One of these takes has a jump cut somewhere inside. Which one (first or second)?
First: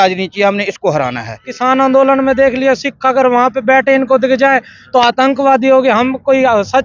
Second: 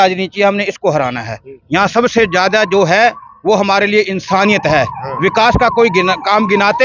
first